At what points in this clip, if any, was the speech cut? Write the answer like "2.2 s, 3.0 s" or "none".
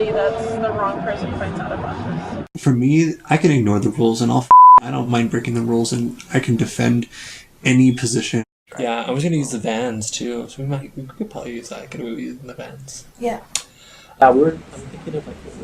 2.5 s, 8.4 s, 14.2 s